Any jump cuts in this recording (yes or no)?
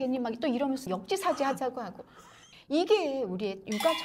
yes